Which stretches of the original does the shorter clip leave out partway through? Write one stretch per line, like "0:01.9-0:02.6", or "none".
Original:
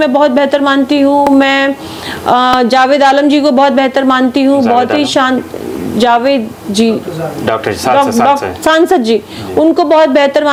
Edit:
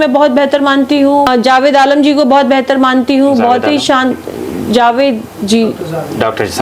0:01.3-0:02.5